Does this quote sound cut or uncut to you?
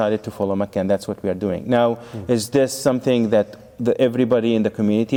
uncut